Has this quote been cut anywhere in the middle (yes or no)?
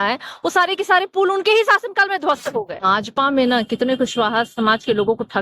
yes